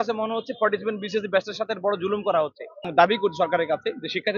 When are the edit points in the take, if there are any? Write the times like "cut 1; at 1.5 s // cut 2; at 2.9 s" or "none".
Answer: cut 1; at 2.8 s